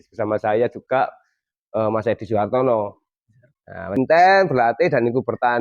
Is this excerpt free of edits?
no; 1 cut; at 3.9 s

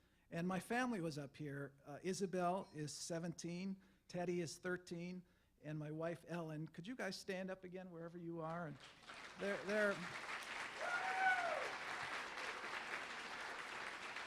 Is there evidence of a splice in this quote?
yes; 1 cut; at 5.3 s

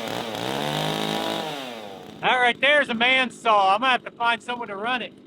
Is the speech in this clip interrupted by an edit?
yes; 1 cut; at 2.0 s

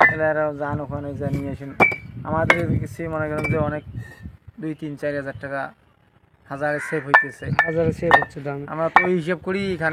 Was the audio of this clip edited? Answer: no; 0 cuts

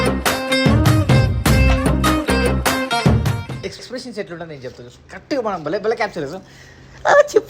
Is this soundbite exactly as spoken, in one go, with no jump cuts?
no; 1 cut; at 3.6 s

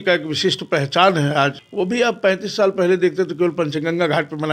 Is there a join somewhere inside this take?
yes; 1 cut; at 1.6 s

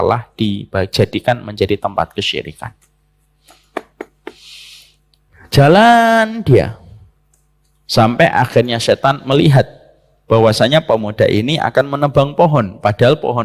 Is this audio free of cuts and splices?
yes; 0 cuts

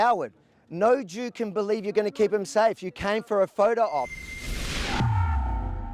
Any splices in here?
yes; 1 cut; at 4.2 s

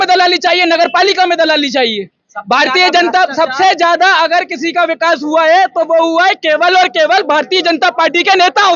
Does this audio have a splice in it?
no; 0 cuts

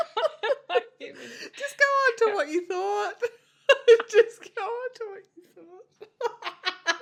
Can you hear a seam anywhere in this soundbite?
no; 0 cuts

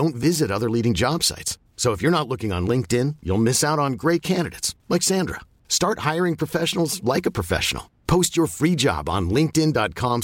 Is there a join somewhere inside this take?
no; 0 cuts

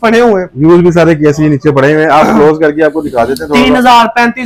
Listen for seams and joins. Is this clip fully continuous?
yes; 0 cuts

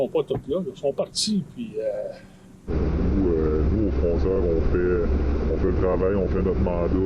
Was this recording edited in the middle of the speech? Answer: yes; 1 cut; at 2.7 s

